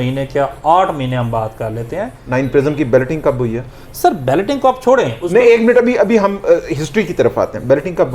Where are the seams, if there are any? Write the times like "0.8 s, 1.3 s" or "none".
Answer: 2.2 s